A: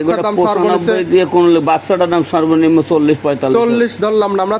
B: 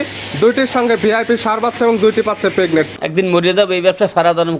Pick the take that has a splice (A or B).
B